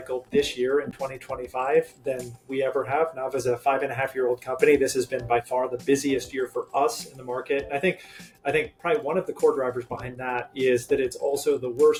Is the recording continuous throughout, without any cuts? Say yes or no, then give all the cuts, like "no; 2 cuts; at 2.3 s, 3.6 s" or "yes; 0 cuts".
yes; 0 cuts